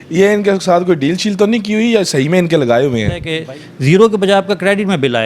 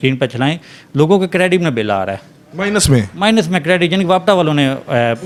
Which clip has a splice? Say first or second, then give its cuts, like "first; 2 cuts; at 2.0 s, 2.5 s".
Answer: first; 1 cut; at 3.3 s